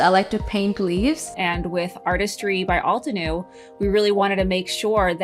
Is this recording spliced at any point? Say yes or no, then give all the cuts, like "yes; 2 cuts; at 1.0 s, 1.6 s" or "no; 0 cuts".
yes; 1 cut; at 1.3 s